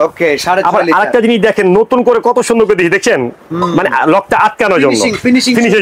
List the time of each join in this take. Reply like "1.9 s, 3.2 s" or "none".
none